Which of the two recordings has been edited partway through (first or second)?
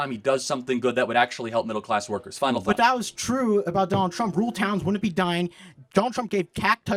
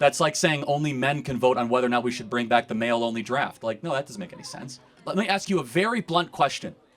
second